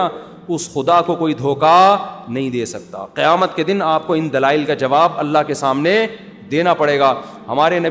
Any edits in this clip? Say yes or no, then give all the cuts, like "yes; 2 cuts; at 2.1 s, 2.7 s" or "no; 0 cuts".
no; 0 cuts